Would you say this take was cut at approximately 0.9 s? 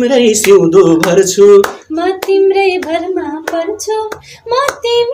no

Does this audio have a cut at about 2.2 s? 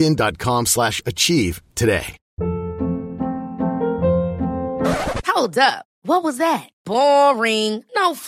yes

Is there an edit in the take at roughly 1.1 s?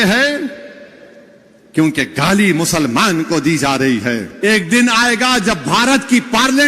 no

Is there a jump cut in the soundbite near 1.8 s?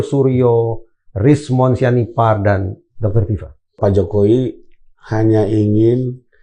no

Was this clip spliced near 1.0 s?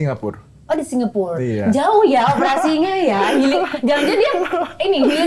no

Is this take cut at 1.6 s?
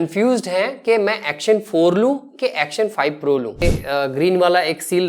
no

